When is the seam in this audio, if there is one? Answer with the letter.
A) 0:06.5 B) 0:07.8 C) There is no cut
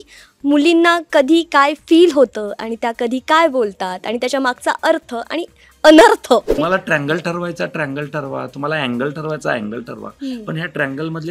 A